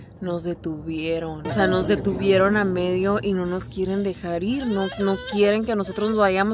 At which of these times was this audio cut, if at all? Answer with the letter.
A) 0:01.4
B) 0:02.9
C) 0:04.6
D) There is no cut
A